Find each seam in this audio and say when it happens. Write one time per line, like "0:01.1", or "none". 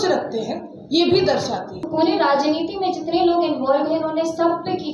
0:01.8